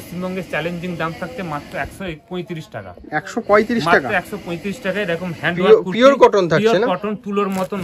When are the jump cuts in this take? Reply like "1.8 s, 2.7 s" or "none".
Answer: none